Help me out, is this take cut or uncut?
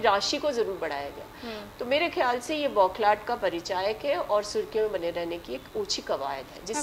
uncut